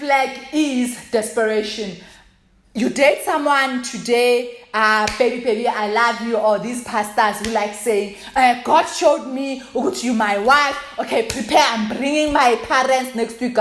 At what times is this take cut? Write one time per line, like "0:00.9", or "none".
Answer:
none